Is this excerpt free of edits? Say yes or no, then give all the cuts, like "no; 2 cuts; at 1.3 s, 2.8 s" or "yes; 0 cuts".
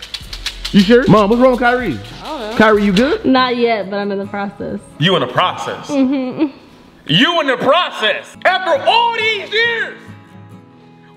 no; 2 cuts; at 3.2 s, 8.3 s